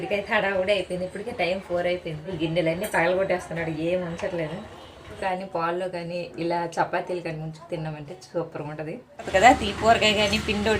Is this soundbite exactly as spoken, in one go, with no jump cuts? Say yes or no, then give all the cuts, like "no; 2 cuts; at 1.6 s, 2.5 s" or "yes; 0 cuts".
no; 3 cuts; at 2.3 s, 5.2 s, 9.3 s